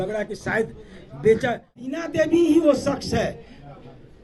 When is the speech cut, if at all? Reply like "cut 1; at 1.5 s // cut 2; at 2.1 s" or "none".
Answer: cut 1; at 2.0 s